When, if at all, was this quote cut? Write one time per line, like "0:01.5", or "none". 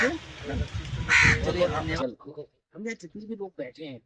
0:01.9